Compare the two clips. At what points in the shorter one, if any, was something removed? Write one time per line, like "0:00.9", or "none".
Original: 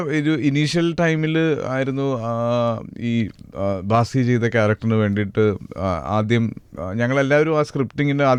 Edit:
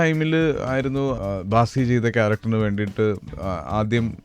0:01.2